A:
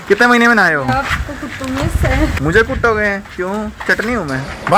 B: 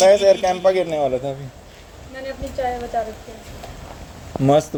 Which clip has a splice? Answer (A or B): A